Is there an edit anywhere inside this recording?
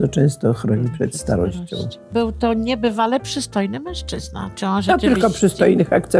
yes; 1 cut; at 2.1 s

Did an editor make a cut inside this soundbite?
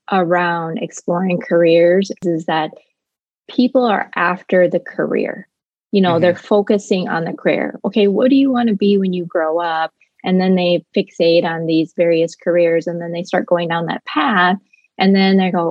yes; 1 cut; at 2.2 s

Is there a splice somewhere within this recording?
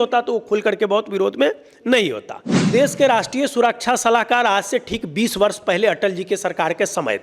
yes; 1 cut; at 2.6 s

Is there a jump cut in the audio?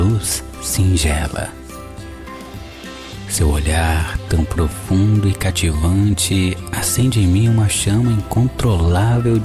no; 0 cuts

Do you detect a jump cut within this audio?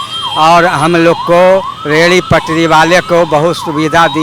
no; 0 cuts

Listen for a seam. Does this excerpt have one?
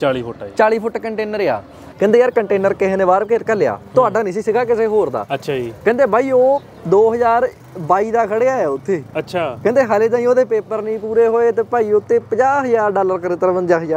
yes; 1 cut; at 1.8 s

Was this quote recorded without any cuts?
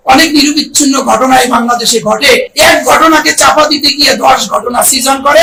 yes; 0 cuts

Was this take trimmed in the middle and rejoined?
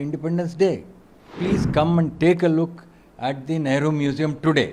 yes; 1 cut; at 1.4 s

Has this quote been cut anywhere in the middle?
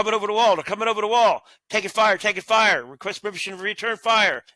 no; 0 cuts

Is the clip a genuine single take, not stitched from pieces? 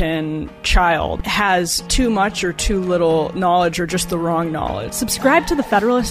no; 2 cuts; at 1.2 s, 4.9 s

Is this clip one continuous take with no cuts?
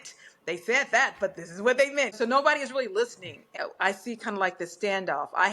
no; 2 cuts; at 2.1 s, 3.5 s

